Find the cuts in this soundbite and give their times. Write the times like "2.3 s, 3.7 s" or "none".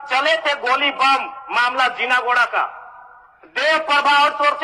none